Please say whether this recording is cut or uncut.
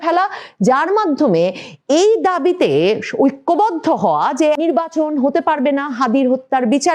cut